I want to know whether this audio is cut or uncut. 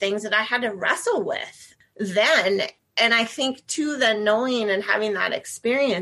uncut